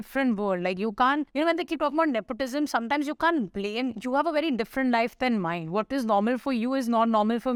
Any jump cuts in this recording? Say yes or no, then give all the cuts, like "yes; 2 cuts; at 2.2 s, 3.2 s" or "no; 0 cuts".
no; 0 cuts